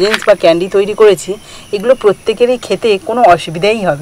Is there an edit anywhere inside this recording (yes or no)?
no